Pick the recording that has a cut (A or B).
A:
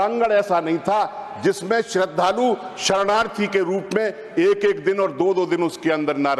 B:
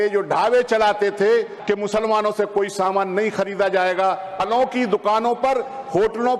B